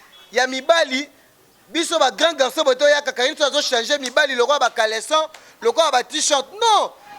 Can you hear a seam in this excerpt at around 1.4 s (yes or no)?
no